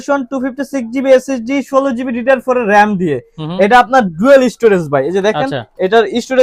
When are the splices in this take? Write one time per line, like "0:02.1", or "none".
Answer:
none

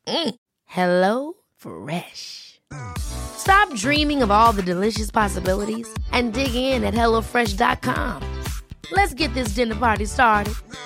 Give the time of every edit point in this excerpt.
none

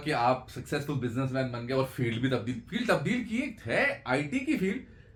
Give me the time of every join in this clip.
none

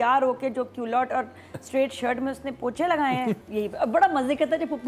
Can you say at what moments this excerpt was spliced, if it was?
0:03.4

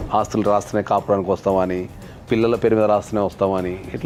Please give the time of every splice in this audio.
none

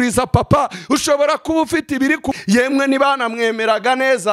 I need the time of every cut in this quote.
0:02.4

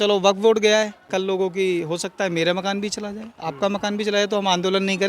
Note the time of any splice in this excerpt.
0:01.1

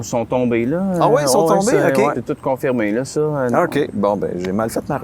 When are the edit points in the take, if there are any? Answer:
0:02.2
0:03.5

